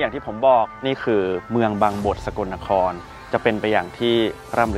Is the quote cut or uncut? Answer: uncut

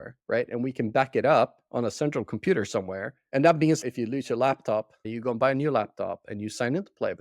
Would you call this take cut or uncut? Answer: cut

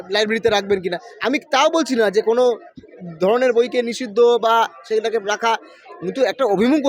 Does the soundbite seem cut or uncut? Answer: uncut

